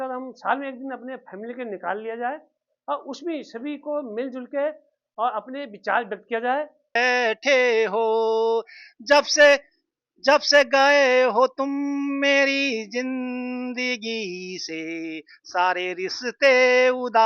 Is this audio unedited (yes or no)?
no